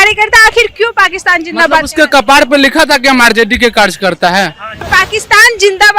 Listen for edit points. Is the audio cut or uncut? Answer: cut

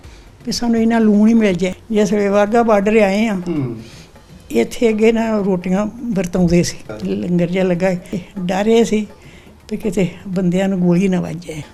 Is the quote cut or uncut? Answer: uncut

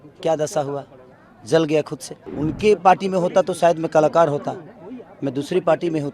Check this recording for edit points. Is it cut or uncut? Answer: cut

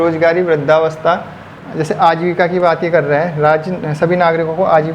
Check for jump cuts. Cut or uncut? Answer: cut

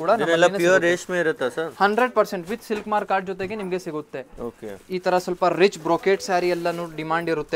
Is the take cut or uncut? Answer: uncut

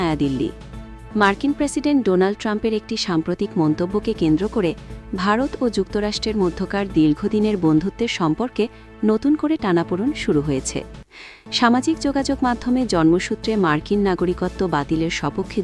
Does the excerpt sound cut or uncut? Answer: uncut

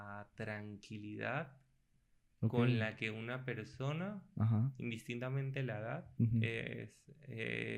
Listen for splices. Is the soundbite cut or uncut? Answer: uncut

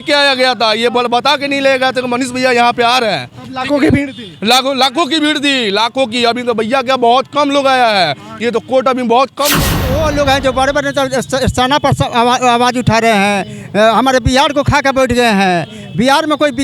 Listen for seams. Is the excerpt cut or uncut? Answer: cut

